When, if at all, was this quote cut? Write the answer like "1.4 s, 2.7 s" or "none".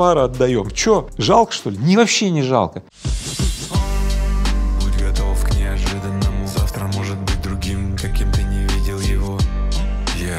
1.1 s, 2.9 s